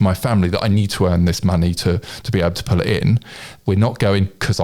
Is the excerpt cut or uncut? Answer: cut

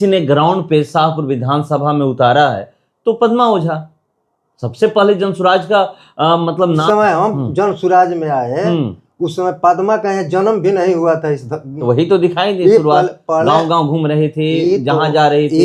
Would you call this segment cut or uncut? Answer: cut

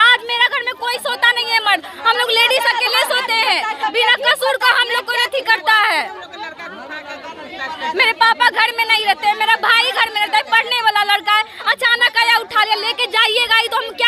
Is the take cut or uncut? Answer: uncut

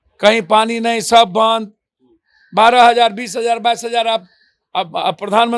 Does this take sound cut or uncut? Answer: uncut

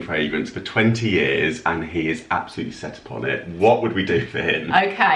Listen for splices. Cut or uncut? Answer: uncut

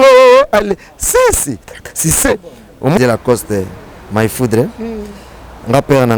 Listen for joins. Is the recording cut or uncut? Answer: cut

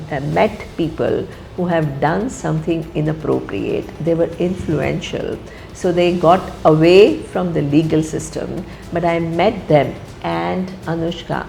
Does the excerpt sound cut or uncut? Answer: uncut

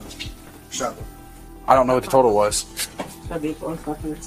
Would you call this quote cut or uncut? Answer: uncut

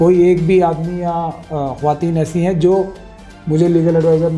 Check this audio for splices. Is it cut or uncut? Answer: uncut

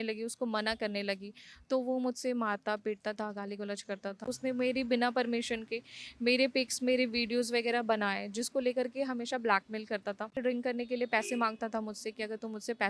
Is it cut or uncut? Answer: cut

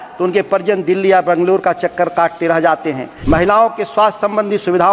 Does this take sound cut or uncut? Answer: cut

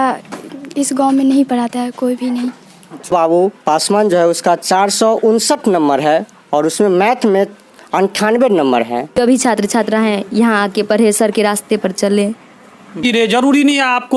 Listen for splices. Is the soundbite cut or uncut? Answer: cut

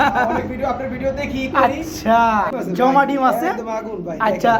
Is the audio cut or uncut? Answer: cut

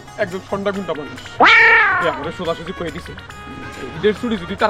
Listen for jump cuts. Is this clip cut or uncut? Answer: uncut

